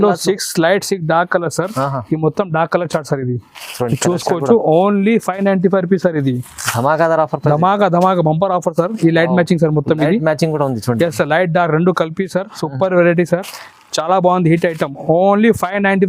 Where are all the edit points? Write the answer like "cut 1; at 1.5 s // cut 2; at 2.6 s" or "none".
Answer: none